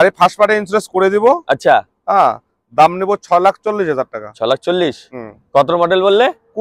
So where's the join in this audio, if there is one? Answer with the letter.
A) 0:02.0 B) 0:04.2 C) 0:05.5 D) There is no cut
D